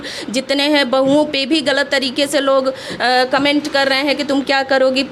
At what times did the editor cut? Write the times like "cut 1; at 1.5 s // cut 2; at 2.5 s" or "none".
none